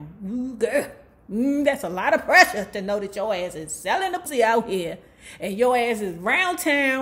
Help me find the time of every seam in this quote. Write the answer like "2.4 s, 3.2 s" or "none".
4.2 s